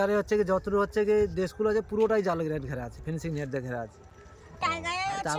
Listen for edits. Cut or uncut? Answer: uncut